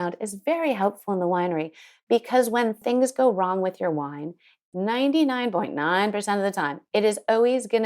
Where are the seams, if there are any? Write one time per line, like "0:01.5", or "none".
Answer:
0:02.8
0:04.6